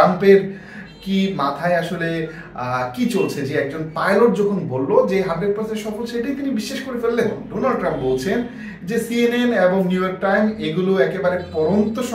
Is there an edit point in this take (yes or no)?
yes